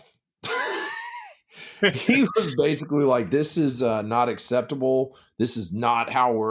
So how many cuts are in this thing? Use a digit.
0